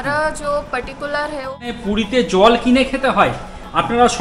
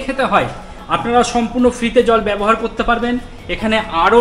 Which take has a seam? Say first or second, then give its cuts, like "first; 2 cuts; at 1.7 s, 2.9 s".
first; 1 cut; at 1.8 s